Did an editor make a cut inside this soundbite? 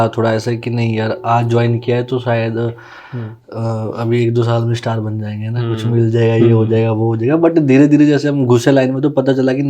no; 0 cuts

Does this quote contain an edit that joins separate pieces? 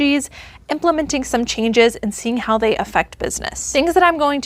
yes; 1 cut; at 3.6 s

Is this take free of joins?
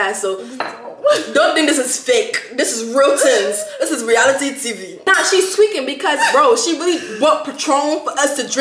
no; 1 cut; at 5.1 s

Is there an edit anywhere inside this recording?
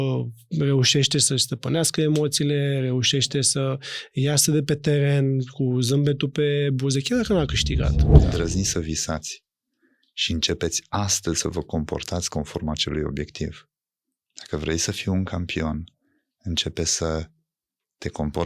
yes; 1 cut; at 8.0 s

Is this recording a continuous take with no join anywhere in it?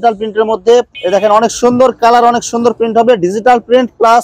no; 1 cut; at 0.9 s

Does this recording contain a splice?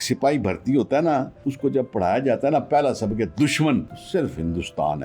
yes; 2 cuts; at 1.4 s, 4.0 s

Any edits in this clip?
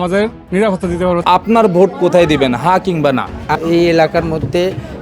yes; 2 cuts; at 1.2 s, 3.6 s

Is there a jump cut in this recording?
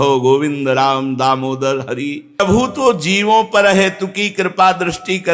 yes; 1 cut; at 2.4 s

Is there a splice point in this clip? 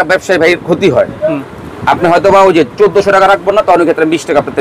no; 0 cuts

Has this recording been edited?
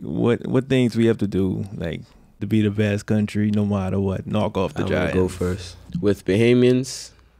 yes; 2 cuts; at 2.4 s, 5.9 s

